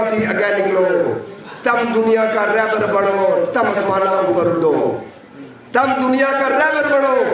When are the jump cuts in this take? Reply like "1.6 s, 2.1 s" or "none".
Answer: none